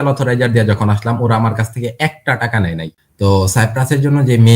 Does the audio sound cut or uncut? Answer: cut